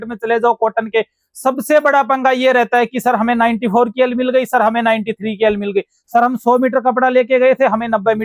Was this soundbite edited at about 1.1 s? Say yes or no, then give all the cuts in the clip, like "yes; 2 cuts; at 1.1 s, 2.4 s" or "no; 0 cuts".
no; 0 cuts